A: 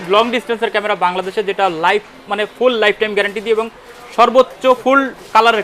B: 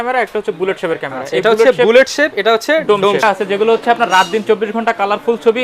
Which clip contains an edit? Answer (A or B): B